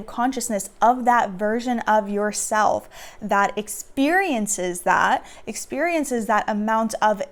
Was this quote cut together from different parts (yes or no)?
no